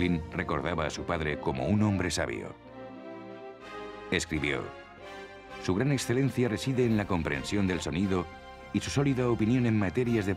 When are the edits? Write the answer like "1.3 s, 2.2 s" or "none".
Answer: 8.0 s